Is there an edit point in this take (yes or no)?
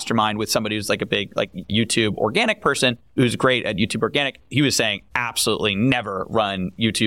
yes